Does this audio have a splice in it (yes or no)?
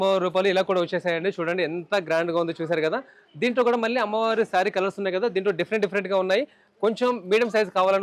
no